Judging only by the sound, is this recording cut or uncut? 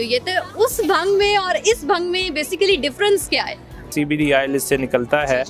cut